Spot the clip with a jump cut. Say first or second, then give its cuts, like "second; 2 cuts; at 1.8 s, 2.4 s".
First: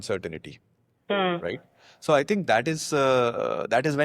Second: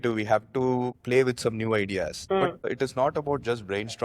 second; 2 cuts; at 1.0 s, 2.7 s